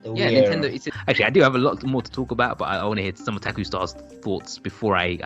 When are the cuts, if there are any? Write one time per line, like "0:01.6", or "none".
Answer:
0:00.9
0:03.5